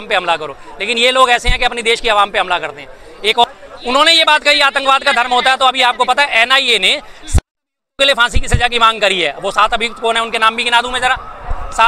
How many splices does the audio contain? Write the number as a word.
one